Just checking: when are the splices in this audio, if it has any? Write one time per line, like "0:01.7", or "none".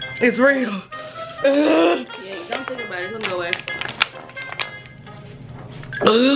0:01.3